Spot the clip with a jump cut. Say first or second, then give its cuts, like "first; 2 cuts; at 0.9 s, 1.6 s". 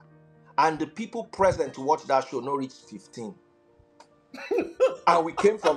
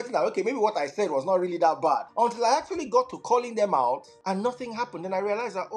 second; 2 cuts; at 2.1 s, 4.1 s